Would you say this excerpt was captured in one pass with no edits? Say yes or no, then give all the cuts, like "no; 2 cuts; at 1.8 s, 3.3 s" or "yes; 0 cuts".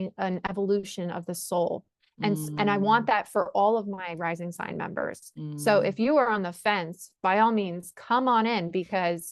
yes; 0 cuts